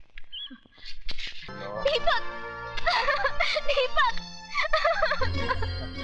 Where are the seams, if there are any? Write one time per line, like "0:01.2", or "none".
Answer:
0:01.5

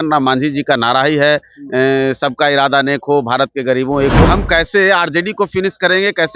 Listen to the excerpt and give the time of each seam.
0:04.3

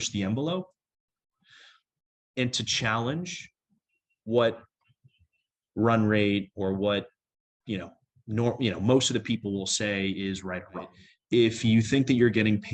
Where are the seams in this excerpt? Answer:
0:11.1

